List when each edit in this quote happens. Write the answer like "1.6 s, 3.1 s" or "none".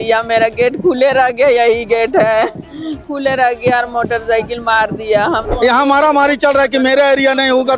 5.5 s